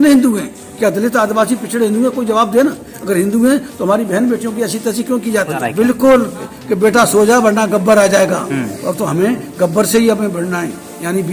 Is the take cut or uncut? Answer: cut